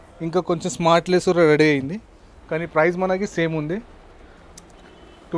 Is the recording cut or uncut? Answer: uncut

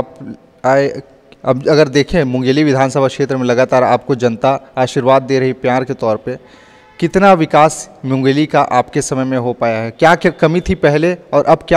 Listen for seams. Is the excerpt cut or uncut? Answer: uncut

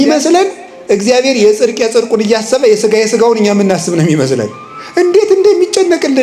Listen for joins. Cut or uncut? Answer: uncut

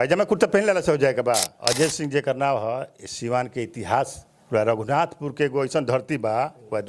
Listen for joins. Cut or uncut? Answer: cut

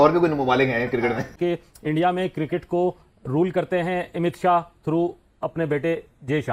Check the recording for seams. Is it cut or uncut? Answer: cut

